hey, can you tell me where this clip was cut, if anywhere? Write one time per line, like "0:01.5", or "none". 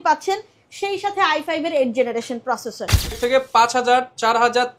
0:03.2